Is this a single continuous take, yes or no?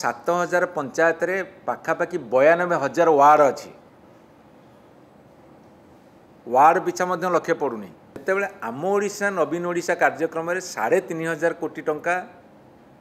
no